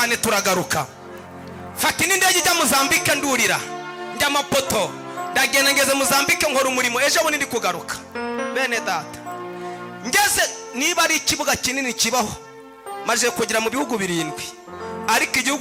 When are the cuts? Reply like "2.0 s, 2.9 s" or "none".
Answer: none